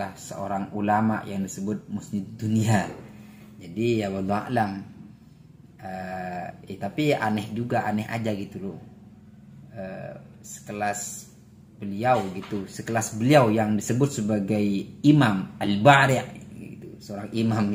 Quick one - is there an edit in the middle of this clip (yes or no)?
no